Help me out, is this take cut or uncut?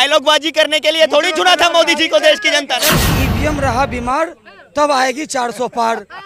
cut